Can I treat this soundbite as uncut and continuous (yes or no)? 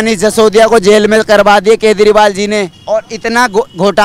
no